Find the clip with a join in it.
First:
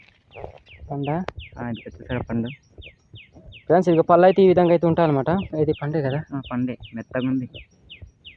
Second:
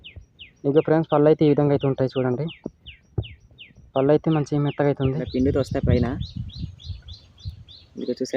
second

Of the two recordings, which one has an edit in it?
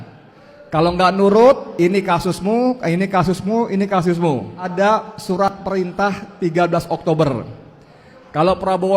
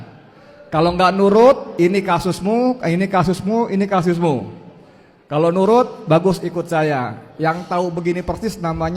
first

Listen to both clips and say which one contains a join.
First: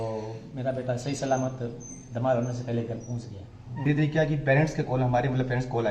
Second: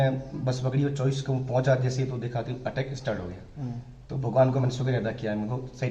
first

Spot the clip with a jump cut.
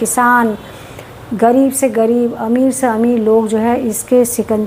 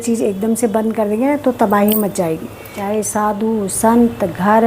second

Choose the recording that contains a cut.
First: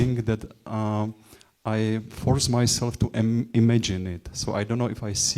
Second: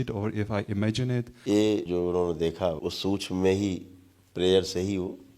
second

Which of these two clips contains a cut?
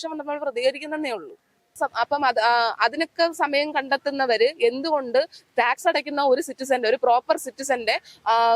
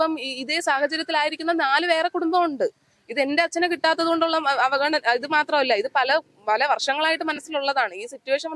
first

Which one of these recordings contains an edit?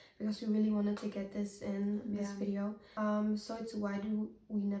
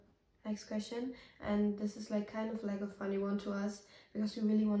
first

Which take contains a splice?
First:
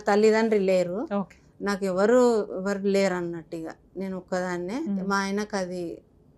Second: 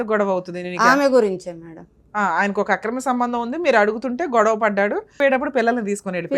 second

